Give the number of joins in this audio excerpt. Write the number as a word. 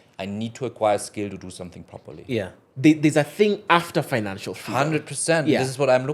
one